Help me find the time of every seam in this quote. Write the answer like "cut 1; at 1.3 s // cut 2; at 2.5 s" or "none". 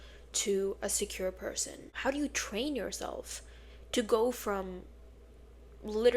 cut 1; at 1.8 s